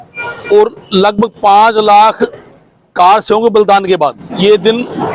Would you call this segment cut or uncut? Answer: cut